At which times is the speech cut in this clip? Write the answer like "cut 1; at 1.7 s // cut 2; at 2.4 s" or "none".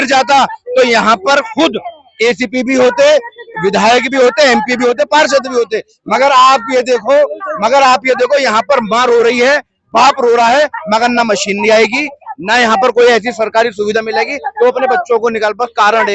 none